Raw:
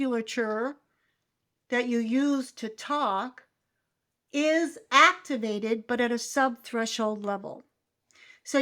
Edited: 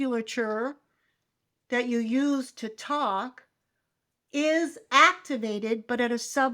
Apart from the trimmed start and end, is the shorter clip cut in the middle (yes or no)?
no